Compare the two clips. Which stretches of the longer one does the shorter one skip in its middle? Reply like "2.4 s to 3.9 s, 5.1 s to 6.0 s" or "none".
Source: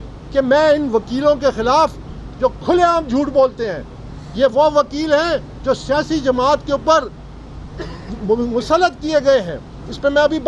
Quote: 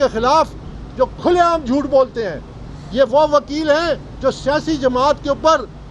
none

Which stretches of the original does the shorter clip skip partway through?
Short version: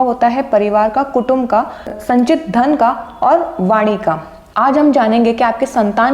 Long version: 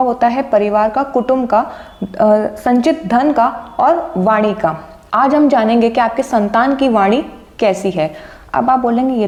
2.0 s to 2.5 s

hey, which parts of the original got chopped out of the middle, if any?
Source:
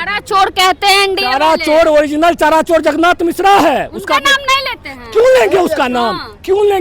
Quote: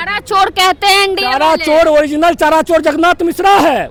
none

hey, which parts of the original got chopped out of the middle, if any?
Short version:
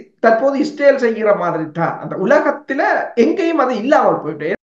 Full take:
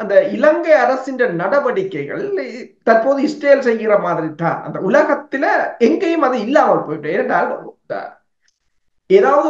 none

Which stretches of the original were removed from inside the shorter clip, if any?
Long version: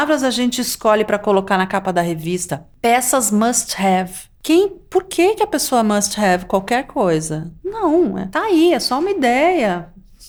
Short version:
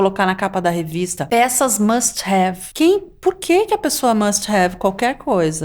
2.5 s to 2.7 s, 4.2 s to 4.3 s

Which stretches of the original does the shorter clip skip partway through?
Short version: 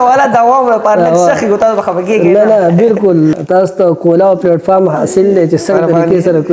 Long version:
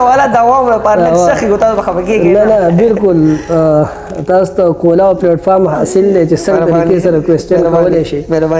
3.4 s to 4.2 s

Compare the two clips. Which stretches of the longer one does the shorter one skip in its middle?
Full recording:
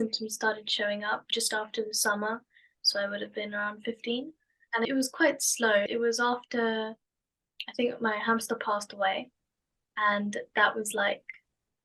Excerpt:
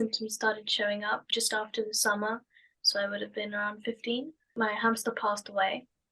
4.5 s to 8.0 s

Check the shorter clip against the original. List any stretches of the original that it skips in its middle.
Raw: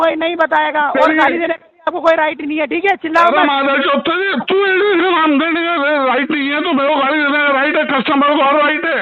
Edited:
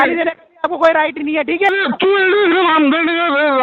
3.0 s to 4.2 s

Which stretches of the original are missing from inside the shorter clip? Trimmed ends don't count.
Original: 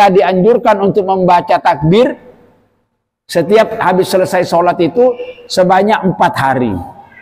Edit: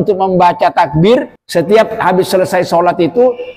2.3 s to 3.2 s

